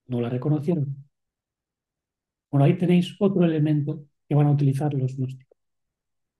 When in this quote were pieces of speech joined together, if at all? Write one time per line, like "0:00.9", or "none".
none